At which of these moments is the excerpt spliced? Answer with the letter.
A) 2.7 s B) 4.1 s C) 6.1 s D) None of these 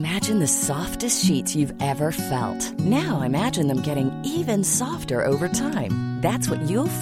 D